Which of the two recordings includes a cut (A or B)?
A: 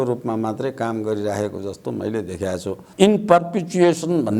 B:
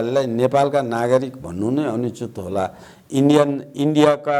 A